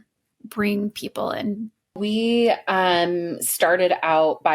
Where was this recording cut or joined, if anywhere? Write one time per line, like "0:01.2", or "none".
0:02.0